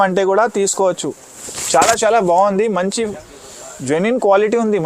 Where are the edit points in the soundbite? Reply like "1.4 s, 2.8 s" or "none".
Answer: none